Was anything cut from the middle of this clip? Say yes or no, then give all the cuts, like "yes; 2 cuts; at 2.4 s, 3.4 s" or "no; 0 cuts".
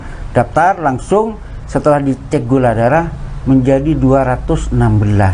no; 0 cuts